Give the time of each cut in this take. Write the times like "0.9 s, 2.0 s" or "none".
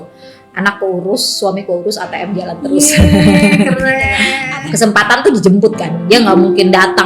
4.3 s